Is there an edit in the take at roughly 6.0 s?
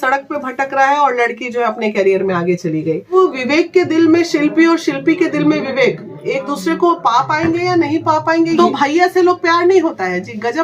no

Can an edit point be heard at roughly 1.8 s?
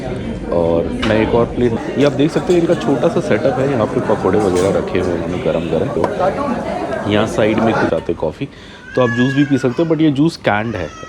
yes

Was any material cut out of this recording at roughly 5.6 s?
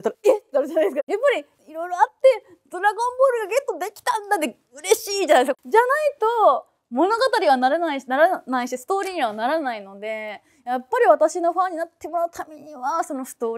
yes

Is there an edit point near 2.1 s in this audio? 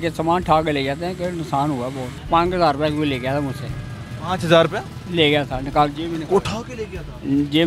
yes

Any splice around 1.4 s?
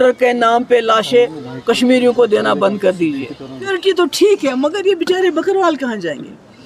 no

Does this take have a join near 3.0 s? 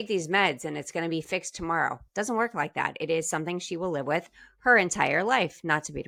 no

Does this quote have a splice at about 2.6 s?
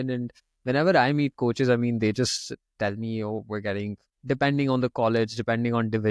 no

